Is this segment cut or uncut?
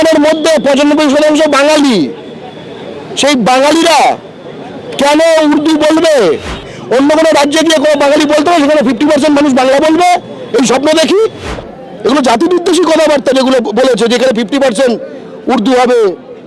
cut